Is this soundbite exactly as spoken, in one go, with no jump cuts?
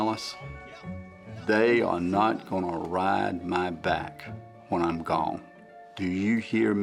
yes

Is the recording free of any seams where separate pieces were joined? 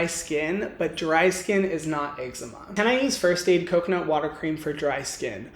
no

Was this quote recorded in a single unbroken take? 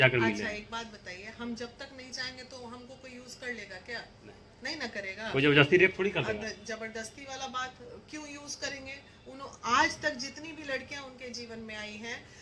yes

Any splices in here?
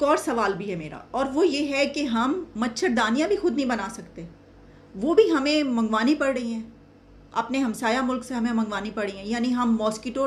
no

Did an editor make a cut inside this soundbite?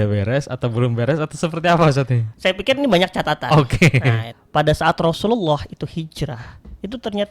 yes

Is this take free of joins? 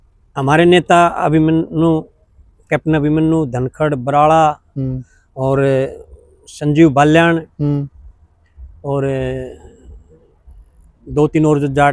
yes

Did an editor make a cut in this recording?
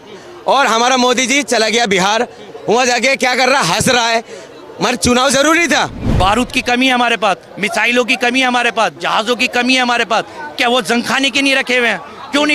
yes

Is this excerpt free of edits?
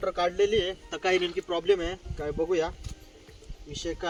yes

